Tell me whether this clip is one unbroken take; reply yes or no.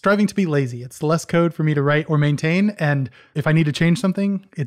yes